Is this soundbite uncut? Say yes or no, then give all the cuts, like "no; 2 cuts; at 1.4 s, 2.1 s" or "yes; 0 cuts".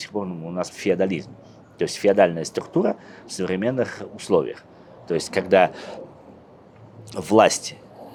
yes; 0 cuts